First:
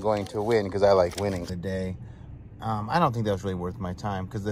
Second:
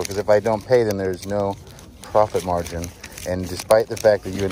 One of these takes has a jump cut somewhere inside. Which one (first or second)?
first